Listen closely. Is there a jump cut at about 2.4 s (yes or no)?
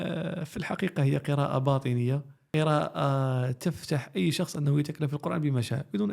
yes